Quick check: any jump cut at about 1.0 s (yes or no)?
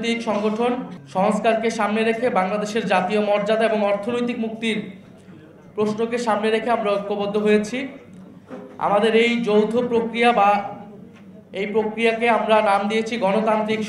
yes